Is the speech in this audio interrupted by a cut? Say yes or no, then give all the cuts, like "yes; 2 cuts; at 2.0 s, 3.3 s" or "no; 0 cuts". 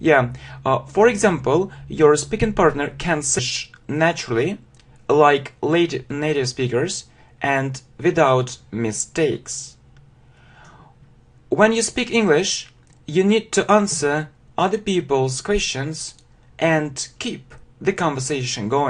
no; 0 cuts